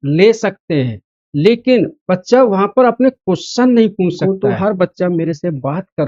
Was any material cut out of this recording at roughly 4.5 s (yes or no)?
yes